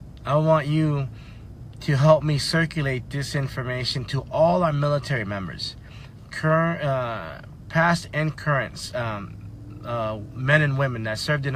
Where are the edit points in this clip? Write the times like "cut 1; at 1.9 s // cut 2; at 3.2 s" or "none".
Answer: cut 1; at 9.8 s